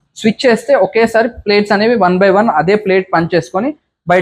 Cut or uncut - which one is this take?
uncut